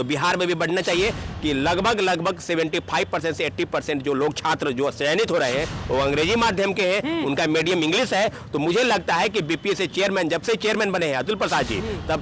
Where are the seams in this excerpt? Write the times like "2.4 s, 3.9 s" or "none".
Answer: 1.3 s